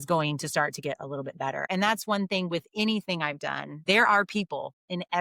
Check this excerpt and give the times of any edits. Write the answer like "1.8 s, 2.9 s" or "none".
1.7 s, 3.7 s

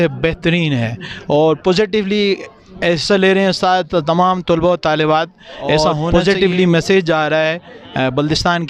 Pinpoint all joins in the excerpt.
6.0 s

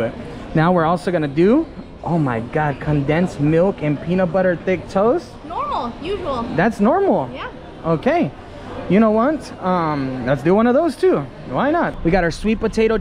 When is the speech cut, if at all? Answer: 12.0 s

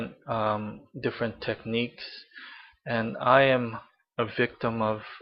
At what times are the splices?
3.5 s

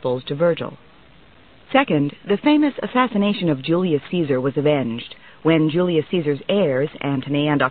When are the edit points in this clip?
1.6 s

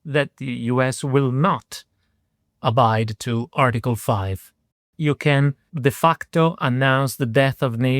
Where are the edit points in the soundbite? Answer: 4.7 s

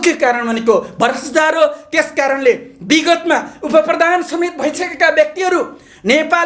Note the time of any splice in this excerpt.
none

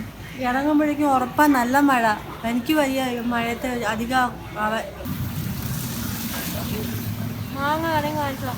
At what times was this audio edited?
5.0 s

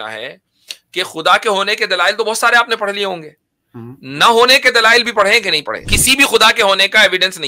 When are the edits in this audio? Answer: 5.9 s

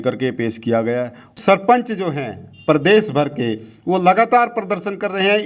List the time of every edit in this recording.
1.3 s

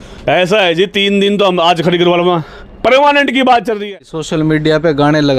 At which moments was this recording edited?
4.1 s

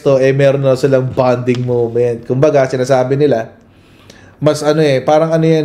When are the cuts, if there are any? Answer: none

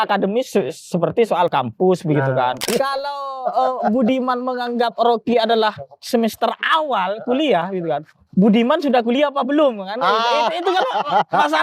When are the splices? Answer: 2.6 s

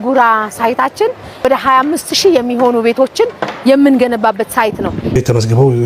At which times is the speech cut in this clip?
1.4 s, 5.1 s

